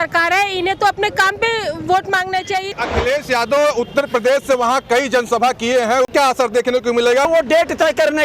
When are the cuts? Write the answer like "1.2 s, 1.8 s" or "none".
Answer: 2.7 s, 6.1 s, 7.3 s